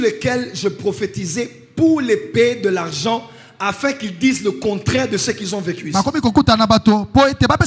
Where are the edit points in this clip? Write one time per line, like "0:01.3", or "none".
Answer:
none